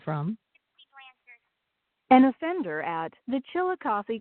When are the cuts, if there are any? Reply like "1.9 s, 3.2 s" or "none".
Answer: none